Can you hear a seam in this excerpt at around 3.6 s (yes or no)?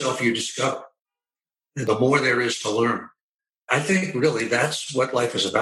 yes